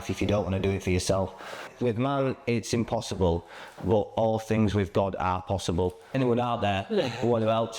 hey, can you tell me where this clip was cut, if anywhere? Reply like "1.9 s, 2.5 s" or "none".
1.7 s, 6.2 s